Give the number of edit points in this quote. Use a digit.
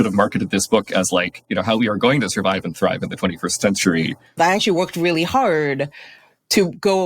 1